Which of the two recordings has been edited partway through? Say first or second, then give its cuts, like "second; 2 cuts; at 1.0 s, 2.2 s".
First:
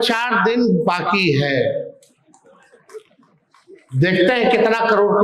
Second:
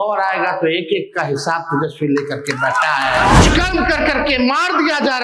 second; 1 cut; at 3.4 s